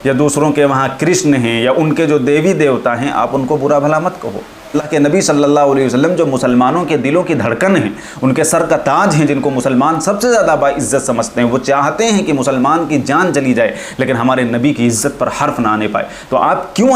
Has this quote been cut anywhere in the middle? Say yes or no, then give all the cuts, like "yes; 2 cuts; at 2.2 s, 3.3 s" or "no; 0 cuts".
yes; 1 cut; at 4.8 s